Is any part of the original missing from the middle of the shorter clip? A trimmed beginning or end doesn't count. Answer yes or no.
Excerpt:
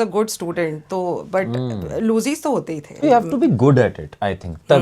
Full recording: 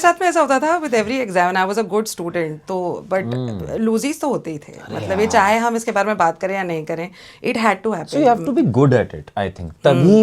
yes